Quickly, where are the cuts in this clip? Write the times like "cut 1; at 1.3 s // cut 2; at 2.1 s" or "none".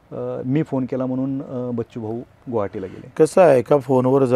none